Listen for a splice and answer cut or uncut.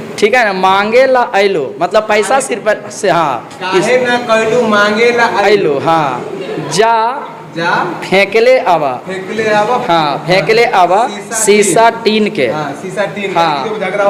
uncut